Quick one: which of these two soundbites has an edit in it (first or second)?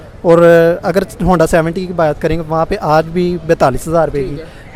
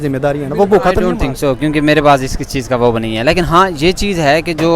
second